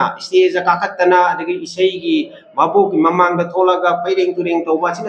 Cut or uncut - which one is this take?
uncut